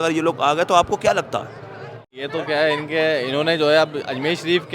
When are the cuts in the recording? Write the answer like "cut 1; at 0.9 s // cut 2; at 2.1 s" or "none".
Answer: cut 1; at 2.1 s